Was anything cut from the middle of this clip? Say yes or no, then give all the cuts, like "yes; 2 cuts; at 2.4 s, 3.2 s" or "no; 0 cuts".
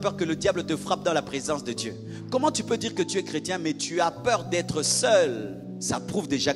yes; 1 cut; at 5.6 s